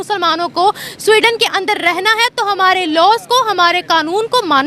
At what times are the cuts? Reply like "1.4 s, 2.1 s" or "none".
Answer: none